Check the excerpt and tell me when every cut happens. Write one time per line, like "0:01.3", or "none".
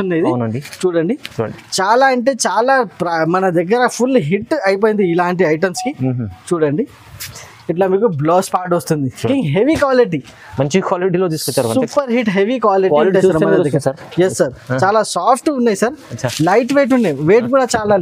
0:09.3